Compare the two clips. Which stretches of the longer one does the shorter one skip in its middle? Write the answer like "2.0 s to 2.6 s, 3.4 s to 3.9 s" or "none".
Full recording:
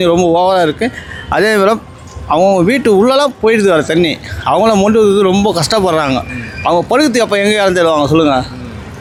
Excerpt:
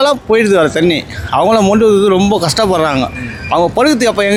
none